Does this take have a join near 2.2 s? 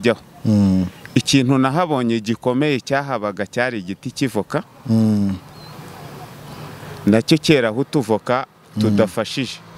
no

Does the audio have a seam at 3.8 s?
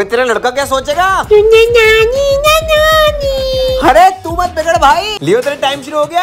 no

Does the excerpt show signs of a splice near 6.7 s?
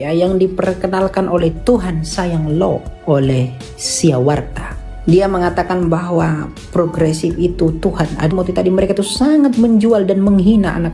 no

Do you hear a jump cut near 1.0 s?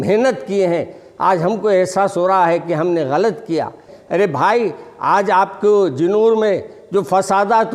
no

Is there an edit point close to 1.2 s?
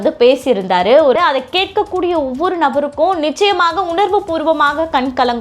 yes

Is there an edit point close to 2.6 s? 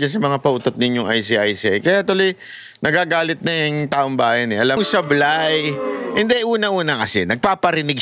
no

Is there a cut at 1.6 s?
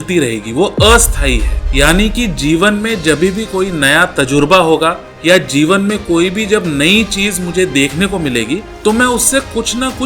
yes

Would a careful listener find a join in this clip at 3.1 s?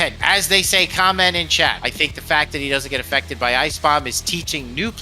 no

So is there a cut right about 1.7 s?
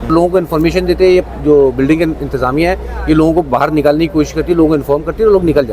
no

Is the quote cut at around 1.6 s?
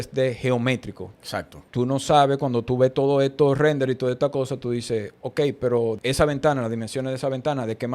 yes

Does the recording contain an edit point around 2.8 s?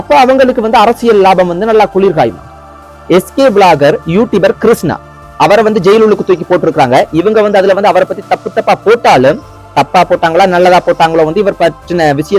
yes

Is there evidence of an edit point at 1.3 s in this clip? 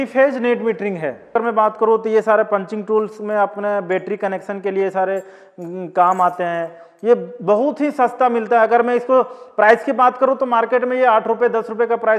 yes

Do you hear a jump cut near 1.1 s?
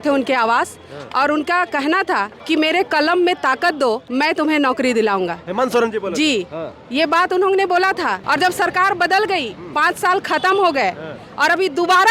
no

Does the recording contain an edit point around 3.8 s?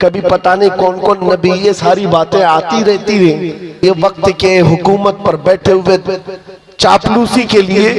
yes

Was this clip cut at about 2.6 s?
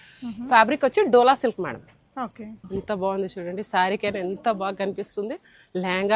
yes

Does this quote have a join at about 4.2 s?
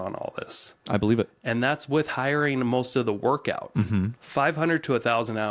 yes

